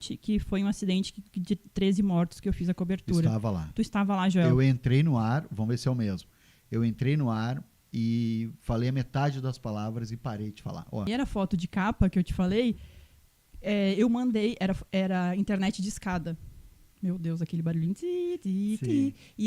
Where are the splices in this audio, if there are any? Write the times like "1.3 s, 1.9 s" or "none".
11.1 s